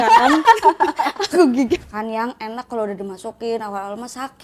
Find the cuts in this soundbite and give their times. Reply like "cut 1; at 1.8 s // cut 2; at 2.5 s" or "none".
cut 1; at 2.0 s